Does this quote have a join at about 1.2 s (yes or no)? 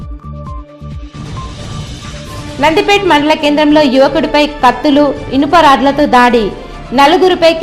yes